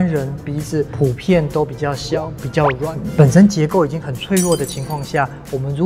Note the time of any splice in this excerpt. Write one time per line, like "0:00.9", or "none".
0:00.9
0:03.0